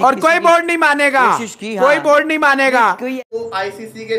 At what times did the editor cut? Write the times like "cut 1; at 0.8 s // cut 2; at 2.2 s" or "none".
cut 1; at 3.2 s